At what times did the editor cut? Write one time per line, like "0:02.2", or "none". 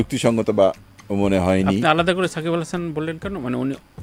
none